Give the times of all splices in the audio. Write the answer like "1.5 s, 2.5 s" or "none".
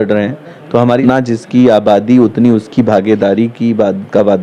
1.0 s